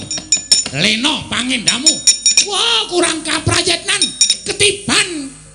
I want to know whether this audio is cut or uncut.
uncut